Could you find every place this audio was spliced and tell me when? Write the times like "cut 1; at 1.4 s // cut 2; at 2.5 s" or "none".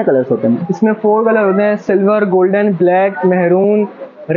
none